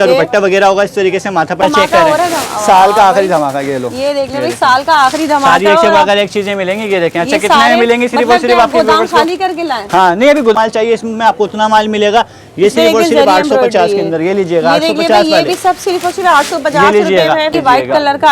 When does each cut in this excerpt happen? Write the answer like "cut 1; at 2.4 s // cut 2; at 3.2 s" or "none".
cut 1; at 1.6 s // cut 2; at 10.5 s // cut 3; at 17.5 s

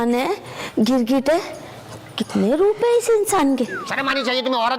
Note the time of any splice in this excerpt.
cut 1; at 3.8 s

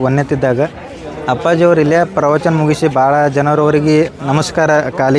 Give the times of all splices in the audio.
none

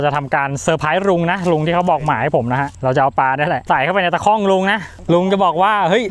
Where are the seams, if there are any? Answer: cut 1; at 4.9 s

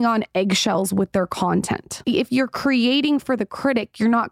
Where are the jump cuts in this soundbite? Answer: cut 1; at 2.0 s

